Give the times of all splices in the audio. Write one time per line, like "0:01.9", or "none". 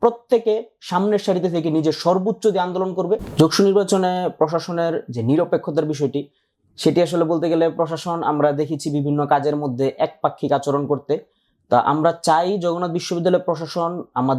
0:03.3